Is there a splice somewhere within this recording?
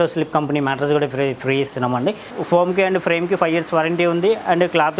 yes; 1 cut; at 2.3 s

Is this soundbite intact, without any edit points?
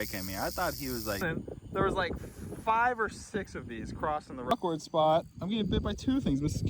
no; 2 cuts; at 1.2 s, 4.5 s

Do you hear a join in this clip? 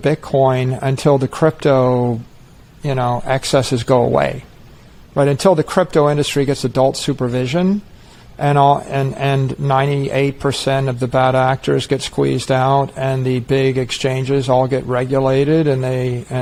no; 0 cuts

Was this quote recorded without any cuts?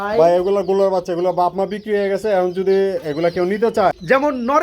no; 1 cut; at 3.7 s

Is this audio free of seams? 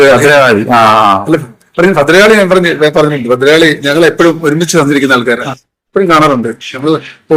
yes; 0 cuts

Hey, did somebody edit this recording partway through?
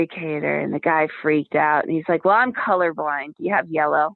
no; 0 cuts

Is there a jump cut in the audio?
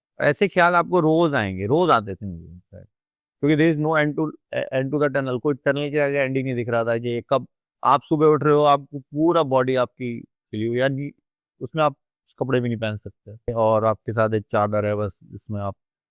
no; 0 cuts

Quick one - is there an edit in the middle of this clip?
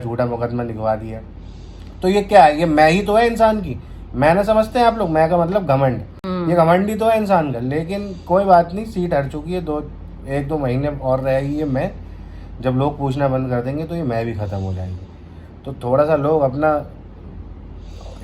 no; 0 cuts

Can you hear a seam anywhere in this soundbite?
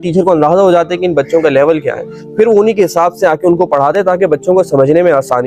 no; 0 cuts

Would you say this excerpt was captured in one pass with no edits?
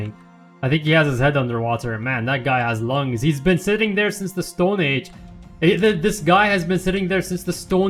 yes; 0 cuts

